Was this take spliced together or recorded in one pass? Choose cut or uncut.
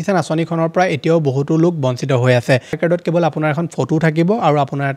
cut